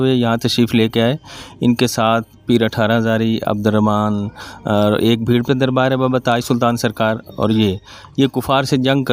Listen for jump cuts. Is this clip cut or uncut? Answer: uncut